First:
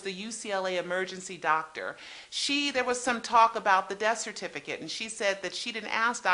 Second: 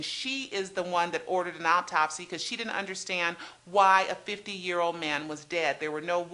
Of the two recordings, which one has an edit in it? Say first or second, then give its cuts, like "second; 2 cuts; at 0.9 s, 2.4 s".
second; 1 cut; at 1.3 s